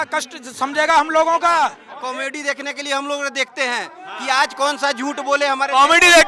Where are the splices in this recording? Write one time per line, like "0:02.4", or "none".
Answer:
0:01.9